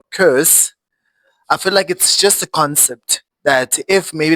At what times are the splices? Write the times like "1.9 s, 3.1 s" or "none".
none